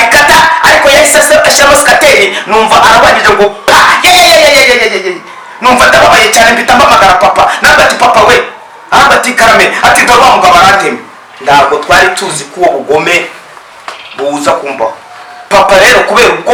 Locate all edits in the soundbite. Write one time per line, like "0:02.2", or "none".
none